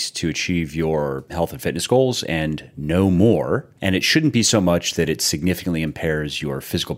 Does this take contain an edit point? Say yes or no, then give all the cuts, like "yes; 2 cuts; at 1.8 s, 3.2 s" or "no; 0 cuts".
yes; 1 cut; at 1.2 s